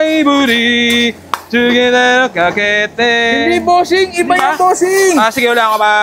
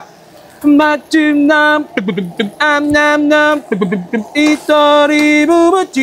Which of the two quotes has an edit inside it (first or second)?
first